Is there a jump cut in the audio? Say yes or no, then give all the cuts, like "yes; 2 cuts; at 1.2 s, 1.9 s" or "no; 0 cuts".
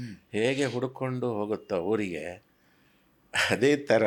no; 0 cuts